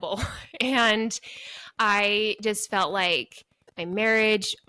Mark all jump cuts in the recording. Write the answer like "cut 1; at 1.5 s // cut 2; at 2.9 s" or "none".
none